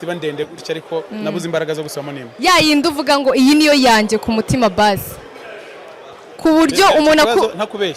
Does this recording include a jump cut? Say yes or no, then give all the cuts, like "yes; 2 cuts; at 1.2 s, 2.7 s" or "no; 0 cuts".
no; 0 cuts